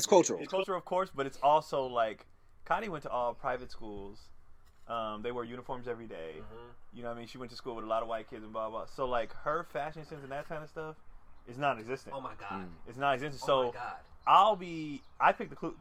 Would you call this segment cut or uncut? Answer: uncut